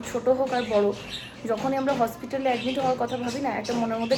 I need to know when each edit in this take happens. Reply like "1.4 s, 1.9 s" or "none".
none